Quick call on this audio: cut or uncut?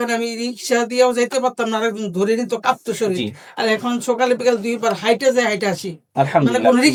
uncut